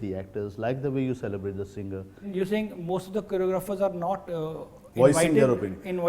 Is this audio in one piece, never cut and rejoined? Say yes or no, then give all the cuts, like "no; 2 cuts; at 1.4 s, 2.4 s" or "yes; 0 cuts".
no; 1 cut; at 2.3 s